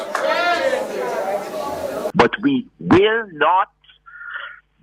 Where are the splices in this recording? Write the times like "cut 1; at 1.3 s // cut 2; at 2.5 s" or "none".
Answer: cut 1; at 2.1 s